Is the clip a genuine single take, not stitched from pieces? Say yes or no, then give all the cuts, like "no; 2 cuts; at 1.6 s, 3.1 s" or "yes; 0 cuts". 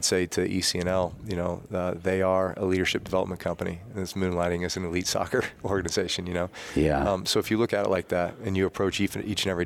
yes; 0 cuts